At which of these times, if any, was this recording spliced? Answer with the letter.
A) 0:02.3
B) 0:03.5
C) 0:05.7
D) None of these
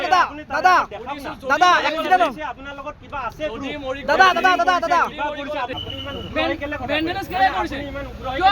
C